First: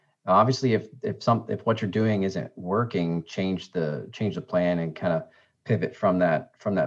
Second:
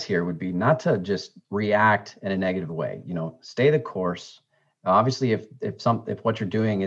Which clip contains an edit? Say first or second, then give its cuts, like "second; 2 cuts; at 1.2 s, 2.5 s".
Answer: second; 1 cut; at 1.4 s